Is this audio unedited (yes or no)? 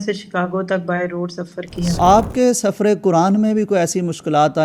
no